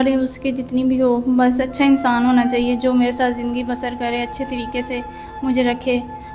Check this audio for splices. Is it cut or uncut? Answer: uncut